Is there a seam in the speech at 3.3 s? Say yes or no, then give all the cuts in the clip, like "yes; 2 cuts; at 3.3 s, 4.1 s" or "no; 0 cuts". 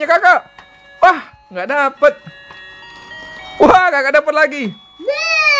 no; 0 cuts